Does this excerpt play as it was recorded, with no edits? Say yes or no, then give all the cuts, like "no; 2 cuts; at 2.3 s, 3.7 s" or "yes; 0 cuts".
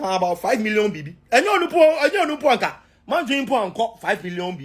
yes; 0 cuts